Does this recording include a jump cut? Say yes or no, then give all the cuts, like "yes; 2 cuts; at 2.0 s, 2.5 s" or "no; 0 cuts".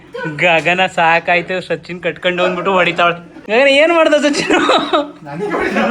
yes; 1 cut; at 3.3 s